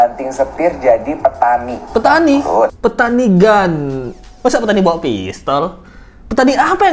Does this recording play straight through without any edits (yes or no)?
no